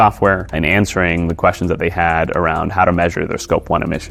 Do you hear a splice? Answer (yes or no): no